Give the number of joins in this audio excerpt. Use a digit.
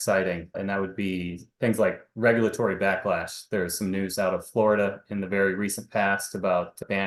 0